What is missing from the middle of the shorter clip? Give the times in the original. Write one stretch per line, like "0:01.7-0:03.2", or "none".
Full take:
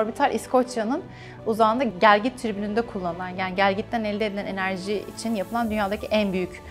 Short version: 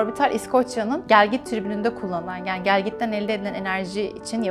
0:01.0-0:02.0